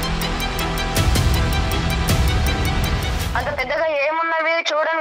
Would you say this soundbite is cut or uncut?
uncut